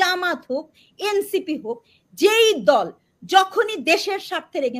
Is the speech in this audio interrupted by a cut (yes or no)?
no